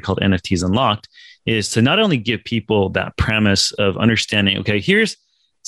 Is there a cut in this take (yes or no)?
no